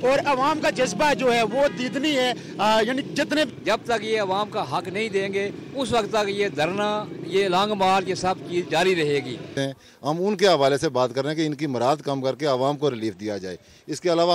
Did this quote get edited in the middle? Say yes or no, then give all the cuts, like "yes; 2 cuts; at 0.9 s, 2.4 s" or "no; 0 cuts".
yes; 2 cuts; at 3.5 s, 9.5 s